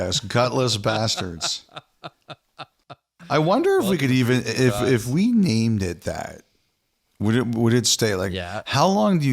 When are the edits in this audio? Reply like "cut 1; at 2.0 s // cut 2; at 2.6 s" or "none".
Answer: cut 1; at 1.3 s